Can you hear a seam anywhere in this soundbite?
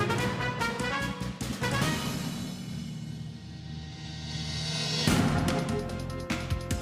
yes; 1 cut; at 5.8 s

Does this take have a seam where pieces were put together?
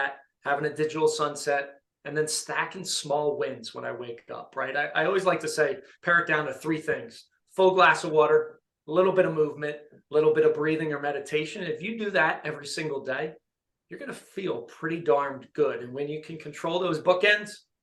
no; 0 cuts

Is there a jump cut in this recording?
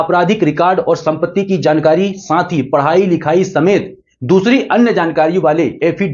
no; 0 cuts

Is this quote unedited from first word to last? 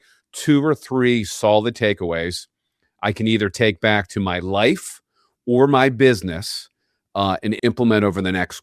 no; 1 cut; at 7.6 s

